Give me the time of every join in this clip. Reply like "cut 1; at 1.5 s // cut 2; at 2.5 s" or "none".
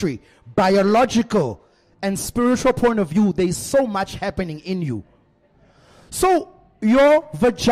none